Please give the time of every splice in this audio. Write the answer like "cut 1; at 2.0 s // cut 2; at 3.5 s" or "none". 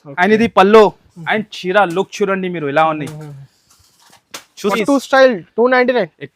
cut 1; at 4.7 s